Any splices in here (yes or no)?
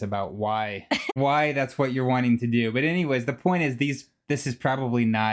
no